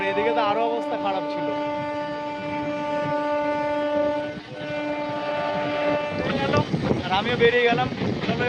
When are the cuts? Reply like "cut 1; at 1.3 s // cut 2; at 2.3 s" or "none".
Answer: none

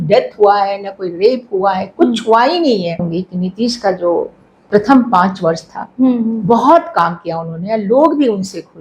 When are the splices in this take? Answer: cut 1; at 3.0 s

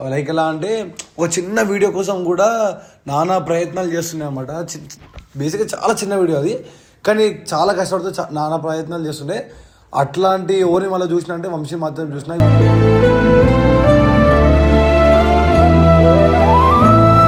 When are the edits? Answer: none

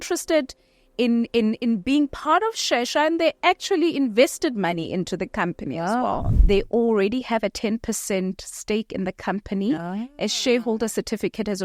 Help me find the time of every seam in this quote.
cut 1; at 6.3 s

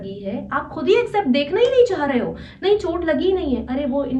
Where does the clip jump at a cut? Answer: none

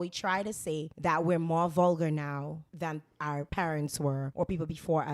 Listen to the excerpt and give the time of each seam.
cut 1; at 0.9 s // cut 2; at 3.2 s // cut 3; at 4.3 s

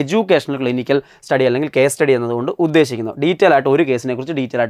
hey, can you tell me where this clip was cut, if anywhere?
none

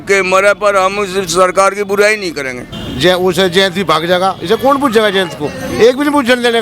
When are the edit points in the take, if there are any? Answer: cut 1; at 2.8 s

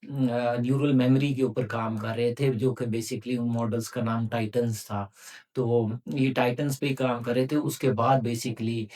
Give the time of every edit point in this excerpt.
none

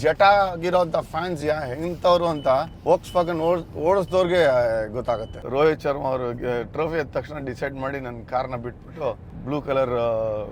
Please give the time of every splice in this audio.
cut 1; at 2.7 s // cut 2; at 5.3 s // cut 3; at 9.3 s

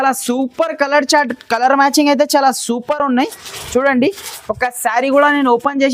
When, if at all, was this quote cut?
none

